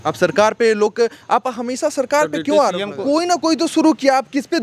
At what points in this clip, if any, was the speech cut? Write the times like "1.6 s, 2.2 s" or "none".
3.0 s